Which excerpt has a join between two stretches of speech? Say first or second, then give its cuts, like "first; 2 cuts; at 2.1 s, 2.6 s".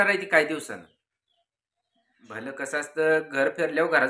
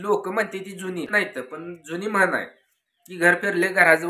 second; 1 cut; at 1.1 s